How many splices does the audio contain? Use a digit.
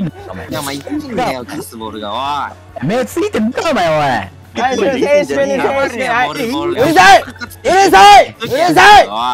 0